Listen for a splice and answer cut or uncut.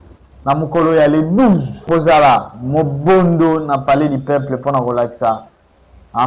cut